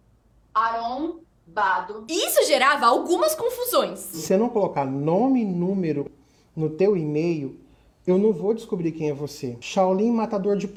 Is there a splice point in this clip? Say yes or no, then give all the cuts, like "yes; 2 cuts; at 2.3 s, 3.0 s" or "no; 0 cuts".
no; 0 cuts